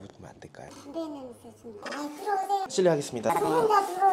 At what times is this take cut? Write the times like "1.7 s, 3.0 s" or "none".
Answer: none